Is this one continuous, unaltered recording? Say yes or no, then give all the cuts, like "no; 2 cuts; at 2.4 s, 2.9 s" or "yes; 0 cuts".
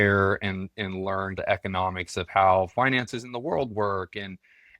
no; 1 cut; at 1.4 s